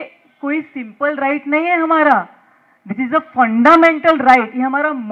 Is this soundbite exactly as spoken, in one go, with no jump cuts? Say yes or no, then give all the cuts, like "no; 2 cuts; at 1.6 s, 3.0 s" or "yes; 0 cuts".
yes; 0 cuts